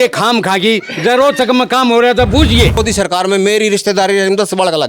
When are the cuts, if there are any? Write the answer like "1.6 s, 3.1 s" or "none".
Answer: 2.8 s